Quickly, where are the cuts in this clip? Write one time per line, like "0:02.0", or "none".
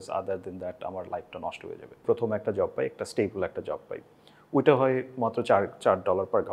0:01.9